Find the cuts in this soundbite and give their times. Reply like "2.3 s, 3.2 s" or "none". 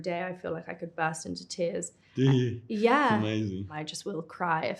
3.7 s